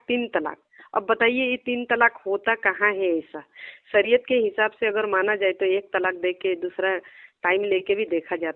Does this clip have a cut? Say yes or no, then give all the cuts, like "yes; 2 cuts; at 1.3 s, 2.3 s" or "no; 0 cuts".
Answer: no; 0 cuts